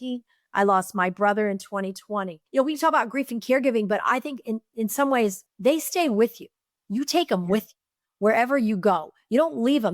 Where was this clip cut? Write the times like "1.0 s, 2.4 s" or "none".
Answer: 2.4 s, 5.4 s